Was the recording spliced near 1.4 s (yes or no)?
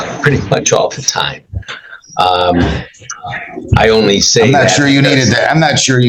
yes